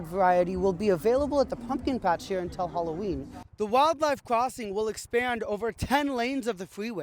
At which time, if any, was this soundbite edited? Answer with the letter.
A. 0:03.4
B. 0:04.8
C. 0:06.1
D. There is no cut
A